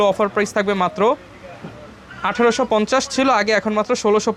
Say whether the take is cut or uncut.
uncut